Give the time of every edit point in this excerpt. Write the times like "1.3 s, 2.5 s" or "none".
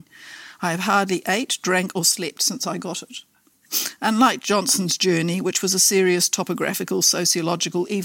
3.7 s